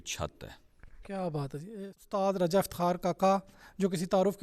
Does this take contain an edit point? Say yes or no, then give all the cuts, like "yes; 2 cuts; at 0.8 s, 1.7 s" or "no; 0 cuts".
yes; 1 cut; at 1.6 s